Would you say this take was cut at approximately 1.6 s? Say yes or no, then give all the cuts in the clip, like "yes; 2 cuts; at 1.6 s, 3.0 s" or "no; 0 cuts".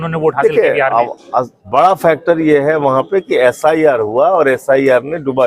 yes; 1 cut; at 1.6 s